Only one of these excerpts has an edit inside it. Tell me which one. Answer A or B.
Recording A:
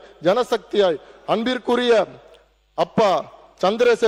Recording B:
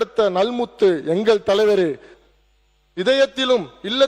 B